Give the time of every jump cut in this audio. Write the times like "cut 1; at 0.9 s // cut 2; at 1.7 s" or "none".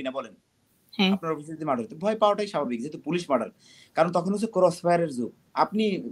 none

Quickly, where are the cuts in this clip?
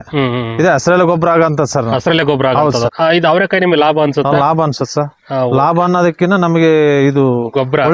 cut 1; at 2.9 s

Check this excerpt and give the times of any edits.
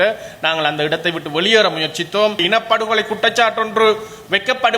cut 1; at 2.4 s

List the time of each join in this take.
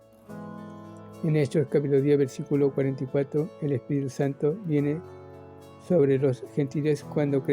cut 1; at 1.2 s

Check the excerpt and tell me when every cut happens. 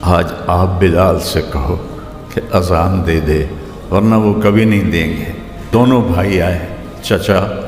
cut 1; at 5.7 s

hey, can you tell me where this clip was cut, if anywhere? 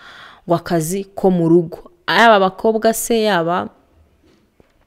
none

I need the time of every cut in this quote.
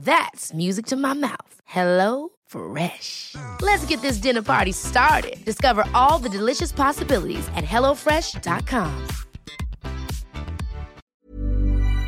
cut 1; at 11.2 s

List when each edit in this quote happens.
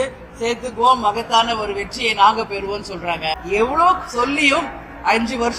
cut 1; at 3.3 s

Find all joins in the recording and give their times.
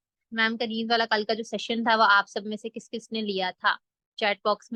none

